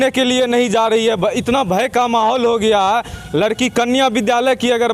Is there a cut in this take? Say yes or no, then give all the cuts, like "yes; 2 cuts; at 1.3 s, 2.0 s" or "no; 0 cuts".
no; 0 cuts